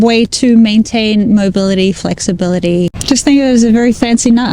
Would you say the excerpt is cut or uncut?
cut